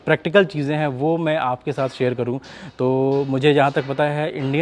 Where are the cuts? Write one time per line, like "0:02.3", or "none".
none